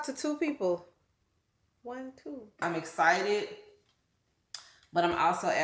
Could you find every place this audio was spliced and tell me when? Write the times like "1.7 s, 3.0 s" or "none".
2.6 s